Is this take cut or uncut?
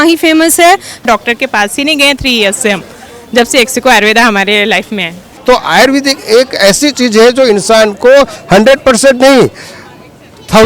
cut